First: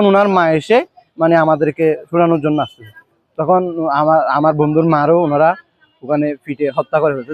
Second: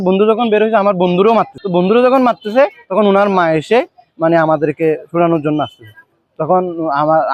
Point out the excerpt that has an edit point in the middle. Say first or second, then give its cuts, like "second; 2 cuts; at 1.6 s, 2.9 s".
second; 1 cut; at 1.6 s